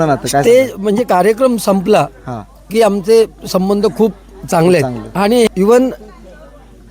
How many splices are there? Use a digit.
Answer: 1